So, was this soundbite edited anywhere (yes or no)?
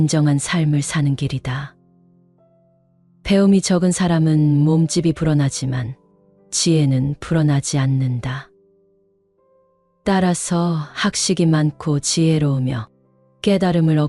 no